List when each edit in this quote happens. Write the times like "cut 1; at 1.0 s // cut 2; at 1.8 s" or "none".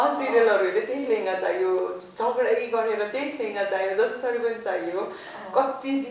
none